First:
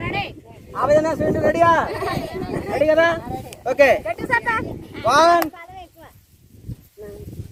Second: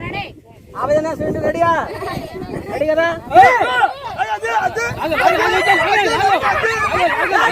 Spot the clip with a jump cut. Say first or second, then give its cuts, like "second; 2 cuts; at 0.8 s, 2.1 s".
second; 1 cut; at 3.3 s